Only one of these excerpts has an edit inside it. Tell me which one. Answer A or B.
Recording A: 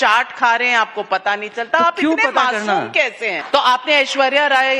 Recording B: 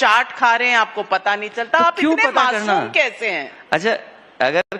A